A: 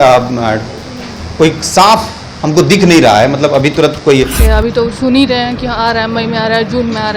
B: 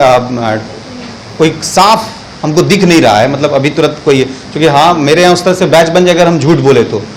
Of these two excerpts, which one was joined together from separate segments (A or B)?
A